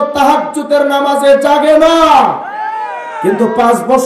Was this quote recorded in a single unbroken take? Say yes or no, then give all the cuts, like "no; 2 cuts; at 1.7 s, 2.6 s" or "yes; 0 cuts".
yes; 0 cuts